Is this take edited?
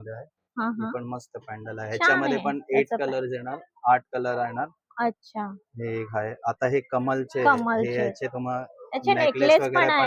no; 0 cuts

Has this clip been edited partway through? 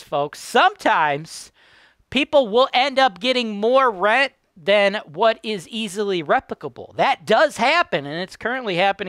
no; 0 cuts

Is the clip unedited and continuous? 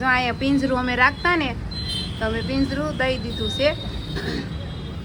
yes; 0 cuts

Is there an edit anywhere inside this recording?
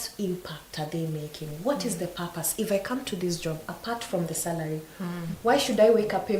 no; 0 cuts

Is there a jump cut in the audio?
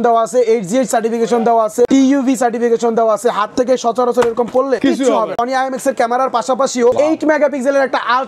yes; 3 cuts; at 1.9 s, 5.1 s, 7.0 s

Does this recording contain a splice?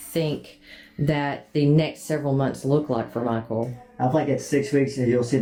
no; 0 cuts

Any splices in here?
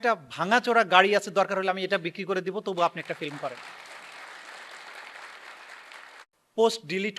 yes; 1 cut; at 6.2 s

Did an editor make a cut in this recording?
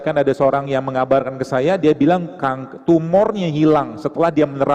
no; 0 cuts

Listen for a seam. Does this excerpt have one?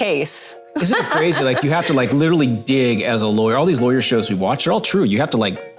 no; 0 cuts

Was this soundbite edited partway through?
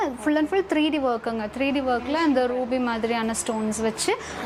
no; 0 cuts

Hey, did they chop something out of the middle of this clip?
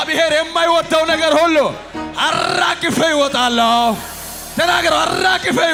no; 0 cuts

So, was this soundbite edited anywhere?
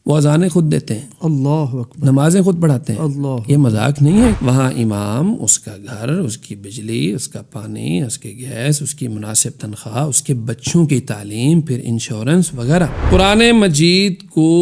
yes; 2 cuts; at 4.3 s, 13.0 s

